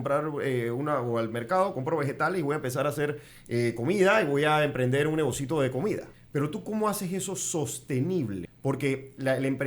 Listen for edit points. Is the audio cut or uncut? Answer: cut